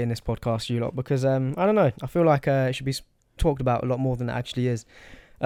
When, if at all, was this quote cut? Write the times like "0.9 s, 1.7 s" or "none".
none